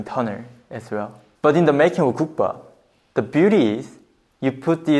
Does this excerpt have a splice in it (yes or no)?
yes